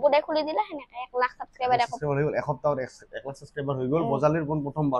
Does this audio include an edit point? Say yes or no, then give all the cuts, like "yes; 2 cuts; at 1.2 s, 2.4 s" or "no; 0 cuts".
no; 0 cuts